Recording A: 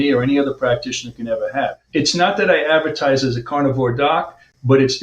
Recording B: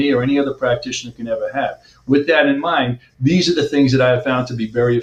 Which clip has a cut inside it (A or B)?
A